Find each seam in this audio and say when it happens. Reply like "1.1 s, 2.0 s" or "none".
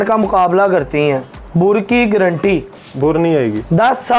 1.3 s, 2.8 s